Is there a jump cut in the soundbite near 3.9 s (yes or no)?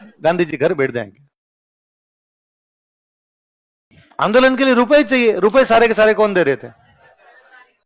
no